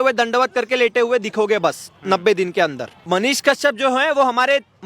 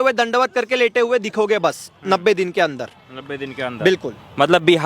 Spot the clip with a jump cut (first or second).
first